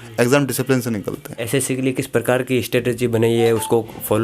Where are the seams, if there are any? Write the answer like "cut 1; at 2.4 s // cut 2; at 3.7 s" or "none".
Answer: cut 1; at 1.3 s